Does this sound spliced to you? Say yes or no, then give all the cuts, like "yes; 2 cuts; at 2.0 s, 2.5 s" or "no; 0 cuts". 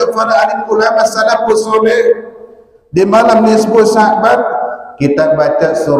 no; 0 cuts